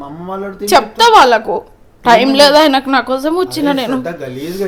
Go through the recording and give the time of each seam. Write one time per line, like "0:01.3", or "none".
none

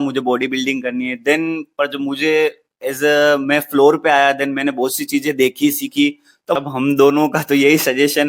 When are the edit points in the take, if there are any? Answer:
0:06.6

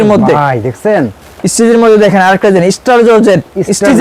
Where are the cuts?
none

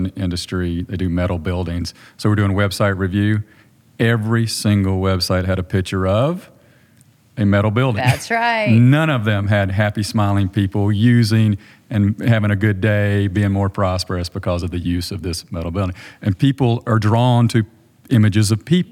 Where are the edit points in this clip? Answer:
none

